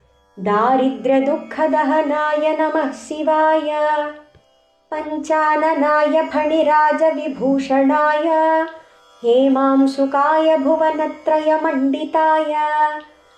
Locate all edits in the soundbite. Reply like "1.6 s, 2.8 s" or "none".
3.5 s